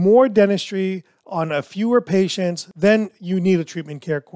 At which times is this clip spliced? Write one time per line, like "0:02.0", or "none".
0:02.6